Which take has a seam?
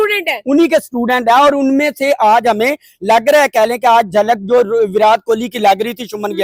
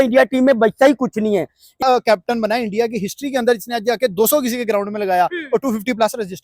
second; 1 cut; at 1.8 s

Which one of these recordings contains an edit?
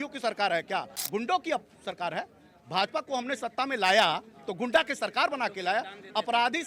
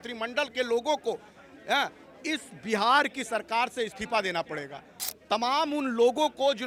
first; 1 cut; at 1.0 s

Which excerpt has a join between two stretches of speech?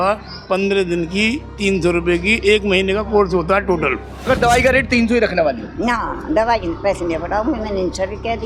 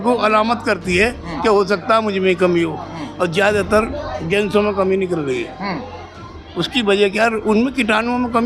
first; 1 cut; at 4.3 s

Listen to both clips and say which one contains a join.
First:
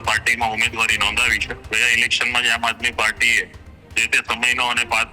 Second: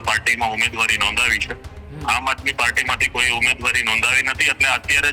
first; 1 cut; at 1.7 s

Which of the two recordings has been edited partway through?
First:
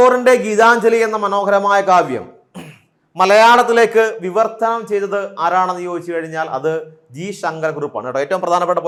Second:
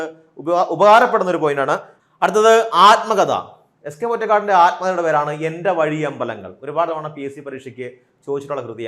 second; 1 cut; at 1.9 s

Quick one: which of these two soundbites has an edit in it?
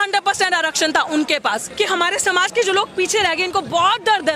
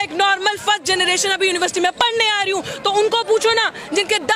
first; 1 cut; at 1.7 s

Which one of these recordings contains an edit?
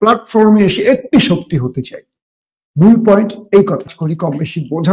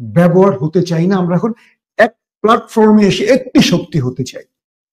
first; 1 cut; at 3.9 s

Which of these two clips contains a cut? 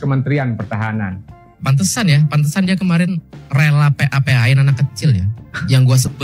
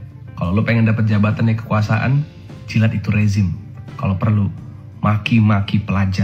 first; 1 cut; at 1.5 s

